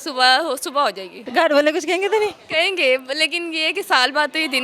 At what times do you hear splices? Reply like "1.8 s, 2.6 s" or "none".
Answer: 1.2 s